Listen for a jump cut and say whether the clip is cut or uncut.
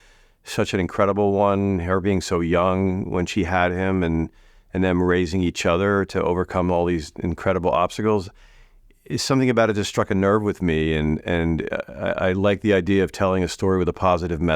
uncut